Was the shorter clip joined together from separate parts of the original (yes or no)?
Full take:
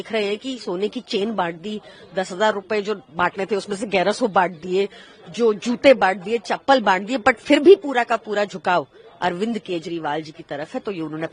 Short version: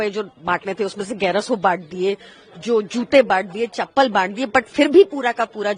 no